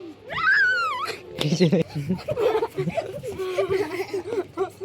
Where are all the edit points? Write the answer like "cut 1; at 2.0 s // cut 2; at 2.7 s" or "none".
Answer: cut 1; at 2.0 s